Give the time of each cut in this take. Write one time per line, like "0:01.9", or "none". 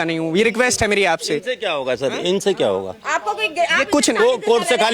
none